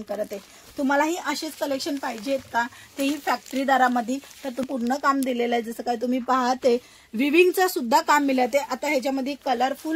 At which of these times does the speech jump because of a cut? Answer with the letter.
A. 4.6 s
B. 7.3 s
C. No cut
A